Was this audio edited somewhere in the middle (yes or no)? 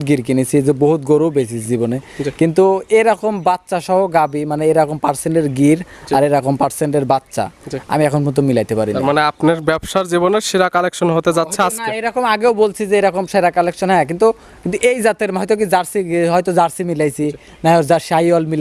no